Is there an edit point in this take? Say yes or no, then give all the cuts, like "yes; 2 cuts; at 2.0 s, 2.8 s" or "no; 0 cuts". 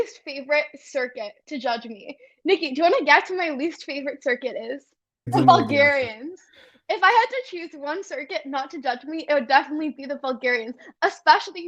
yes; 1 cut; at 5.3 s